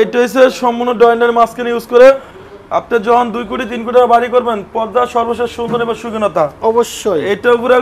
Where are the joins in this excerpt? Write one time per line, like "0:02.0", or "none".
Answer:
none